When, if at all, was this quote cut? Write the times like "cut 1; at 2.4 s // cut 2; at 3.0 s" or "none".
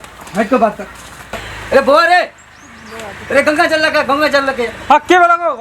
cut 1; at 1.4 s